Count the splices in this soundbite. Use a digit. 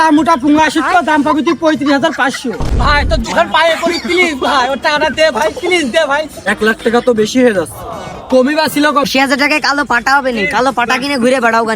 3